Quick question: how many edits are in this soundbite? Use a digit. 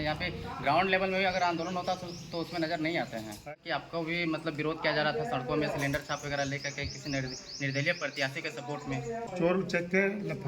2